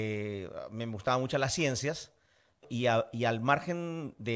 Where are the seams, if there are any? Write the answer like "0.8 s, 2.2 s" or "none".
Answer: 2.6 s